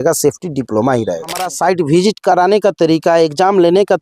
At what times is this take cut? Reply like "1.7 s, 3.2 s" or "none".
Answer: 1.5 s